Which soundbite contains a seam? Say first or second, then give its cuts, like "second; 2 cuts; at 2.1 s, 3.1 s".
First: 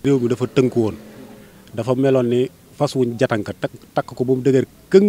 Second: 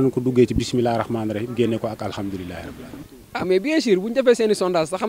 second; 1 cut; at 2.8 s